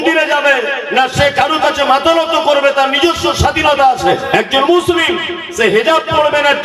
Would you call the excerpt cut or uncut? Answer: cut